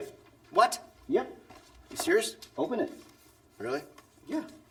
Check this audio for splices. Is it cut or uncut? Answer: uncut